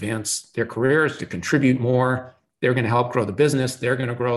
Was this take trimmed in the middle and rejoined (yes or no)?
no